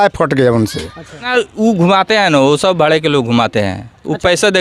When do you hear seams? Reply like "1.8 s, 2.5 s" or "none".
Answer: 1.3 s